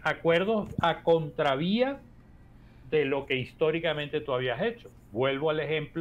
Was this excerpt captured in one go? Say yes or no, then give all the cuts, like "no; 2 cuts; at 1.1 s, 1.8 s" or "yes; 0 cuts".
yes; 0 cuts